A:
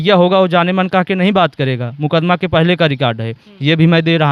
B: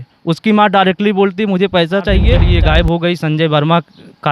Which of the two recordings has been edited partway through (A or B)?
B